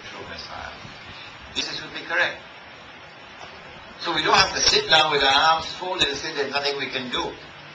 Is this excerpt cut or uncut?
uncut